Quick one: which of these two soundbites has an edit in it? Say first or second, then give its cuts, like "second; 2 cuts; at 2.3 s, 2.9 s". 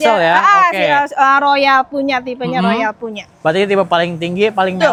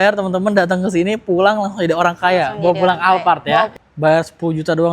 second; 1 cut; at 3.7 s